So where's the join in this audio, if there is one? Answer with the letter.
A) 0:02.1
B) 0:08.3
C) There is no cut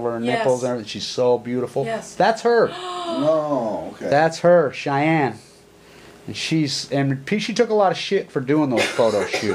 C